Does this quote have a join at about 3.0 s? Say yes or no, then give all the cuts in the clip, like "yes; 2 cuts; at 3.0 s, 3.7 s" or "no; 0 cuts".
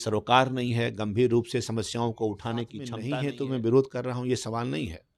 yes; 1 cut; at 3.0 s